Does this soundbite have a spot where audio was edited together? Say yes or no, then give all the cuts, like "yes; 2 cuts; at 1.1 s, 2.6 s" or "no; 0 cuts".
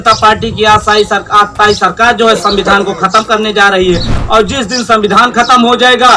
no; 0 cuts